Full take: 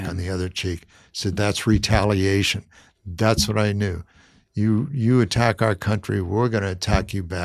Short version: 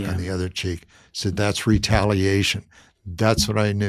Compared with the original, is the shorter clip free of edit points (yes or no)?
yes